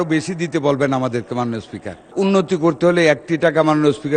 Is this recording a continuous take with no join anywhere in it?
no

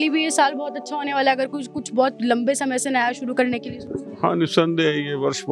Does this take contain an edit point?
no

